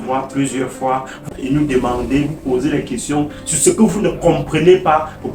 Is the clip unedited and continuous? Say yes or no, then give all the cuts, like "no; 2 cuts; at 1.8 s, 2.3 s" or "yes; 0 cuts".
yes; 0 cuts